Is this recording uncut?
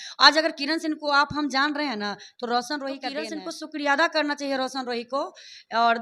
no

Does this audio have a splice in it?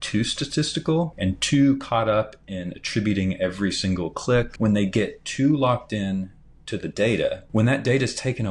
yes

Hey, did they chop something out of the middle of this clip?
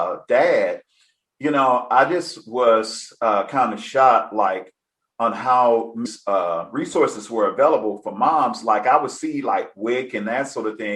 yes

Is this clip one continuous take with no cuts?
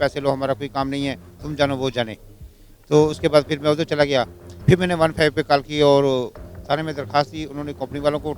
yes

